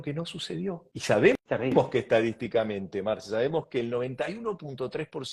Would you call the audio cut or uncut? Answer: cut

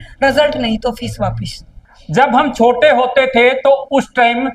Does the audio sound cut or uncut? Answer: cut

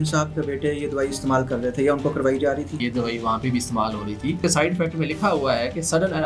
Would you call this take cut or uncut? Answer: cut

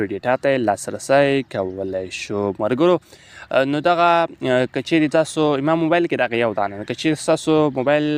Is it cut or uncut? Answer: uncut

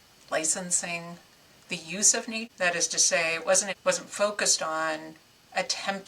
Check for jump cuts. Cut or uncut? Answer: cut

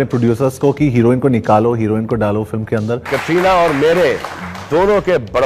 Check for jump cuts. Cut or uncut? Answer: cut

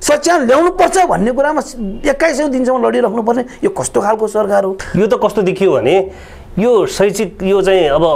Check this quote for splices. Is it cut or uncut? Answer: cut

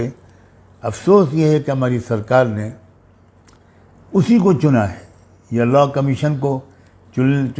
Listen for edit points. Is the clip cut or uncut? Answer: uncut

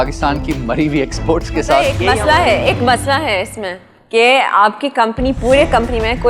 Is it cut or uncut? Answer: cut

